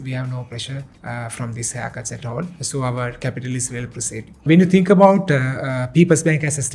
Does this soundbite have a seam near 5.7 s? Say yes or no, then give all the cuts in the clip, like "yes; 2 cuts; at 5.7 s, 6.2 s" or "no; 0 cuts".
no; 3 cuts; at 0.9 s, 2.6 s, 4.4 s